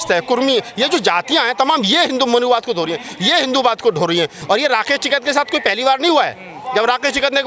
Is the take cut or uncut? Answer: cut